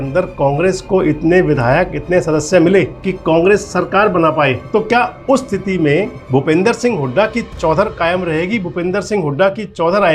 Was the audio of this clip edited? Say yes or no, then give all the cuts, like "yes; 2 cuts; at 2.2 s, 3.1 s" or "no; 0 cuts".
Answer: yes; 3 cuts; at 3.0 s, 4.6 s, 6.2 s